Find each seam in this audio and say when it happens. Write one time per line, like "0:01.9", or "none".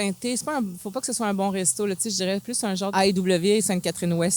0:02.9